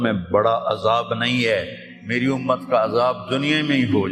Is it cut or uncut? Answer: uncut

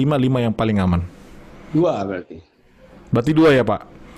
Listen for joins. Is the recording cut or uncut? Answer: uncut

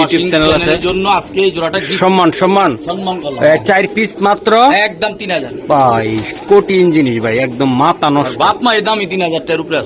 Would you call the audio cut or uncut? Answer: uncut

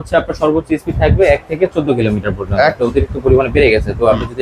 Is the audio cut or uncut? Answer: cut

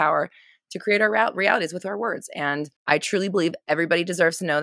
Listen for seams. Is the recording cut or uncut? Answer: cut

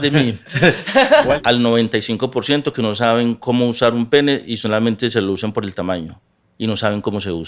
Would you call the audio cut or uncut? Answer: cut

